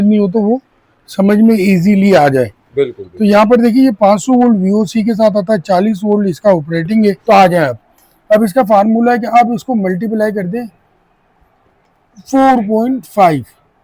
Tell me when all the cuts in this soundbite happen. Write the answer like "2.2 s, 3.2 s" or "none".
7.2 s